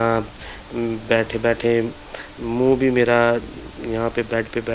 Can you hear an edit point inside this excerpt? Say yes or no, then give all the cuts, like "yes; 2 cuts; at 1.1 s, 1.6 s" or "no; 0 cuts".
no; 0 cuts